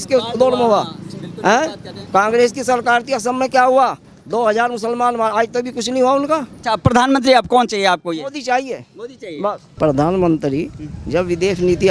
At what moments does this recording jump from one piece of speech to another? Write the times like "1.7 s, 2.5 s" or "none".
6.5 s, 9.7 s